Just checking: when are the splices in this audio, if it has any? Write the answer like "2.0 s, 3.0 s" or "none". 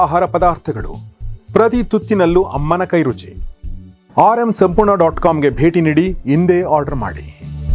none